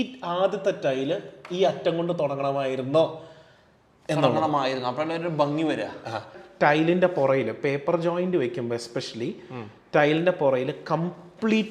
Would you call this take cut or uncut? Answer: cut